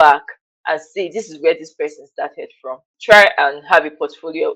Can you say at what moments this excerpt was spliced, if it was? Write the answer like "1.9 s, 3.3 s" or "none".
2.9 s